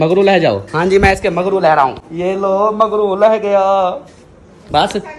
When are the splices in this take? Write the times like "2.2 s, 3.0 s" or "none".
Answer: none